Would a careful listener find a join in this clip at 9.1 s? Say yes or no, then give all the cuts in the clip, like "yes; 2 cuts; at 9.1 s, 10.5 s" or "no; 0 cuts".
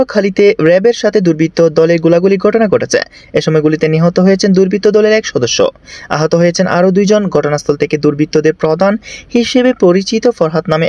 no; 0 cuts